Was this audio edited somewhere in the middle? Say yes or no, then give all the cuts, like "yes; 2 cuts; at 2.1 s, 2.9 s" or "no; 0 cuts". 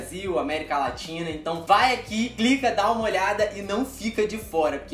no; 0 cuts